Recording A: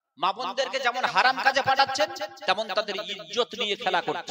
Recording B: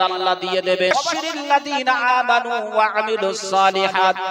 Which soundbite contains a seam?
B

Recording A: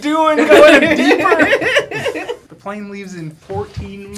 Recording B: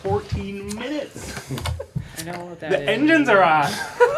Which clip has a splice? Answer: A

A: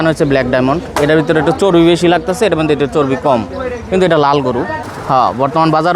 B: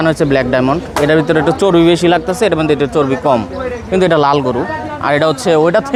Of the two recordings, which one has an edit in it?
A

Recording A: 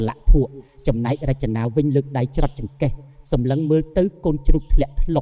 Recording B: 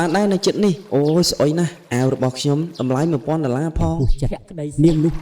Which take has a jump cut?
B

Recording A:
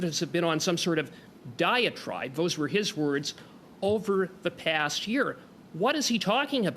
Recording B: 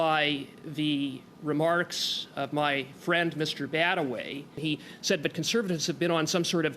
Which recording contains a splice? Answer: B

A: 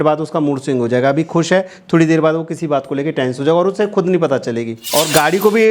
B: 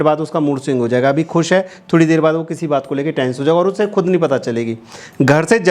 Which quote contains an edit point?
A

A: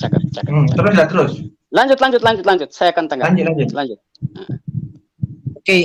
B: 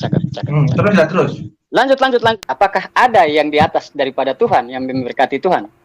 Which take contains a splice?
B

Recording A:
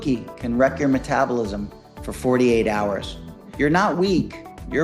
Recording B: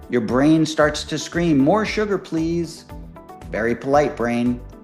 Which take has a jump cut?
A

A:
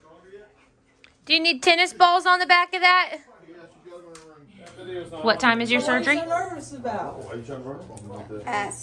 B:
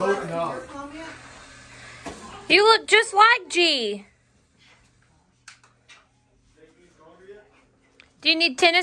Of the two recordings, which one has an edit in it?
A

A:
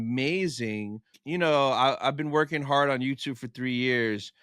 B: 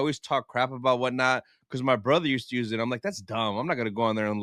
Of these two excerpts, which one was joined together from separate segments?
A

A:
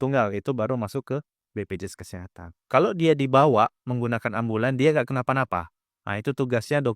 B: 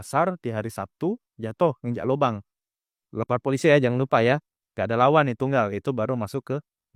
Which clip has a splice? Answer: A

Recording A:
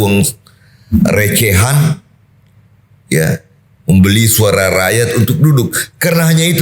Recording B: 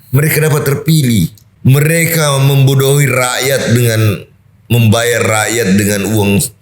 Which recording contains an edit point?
B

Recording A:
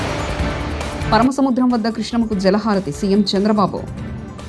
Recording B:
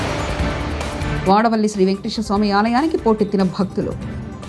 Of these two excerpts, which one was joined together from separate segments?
A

